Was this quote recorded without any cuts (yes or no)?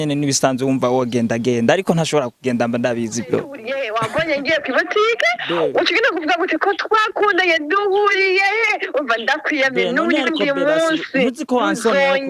no